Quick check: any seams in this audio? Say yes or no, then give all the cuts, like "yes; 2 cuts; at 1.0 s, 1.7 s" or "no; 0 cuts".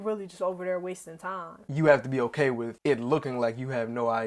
yes; 2 cuts; at 1.5 s, 2.7 s